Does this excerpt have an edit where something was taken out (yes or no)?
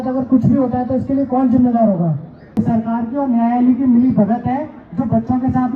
yes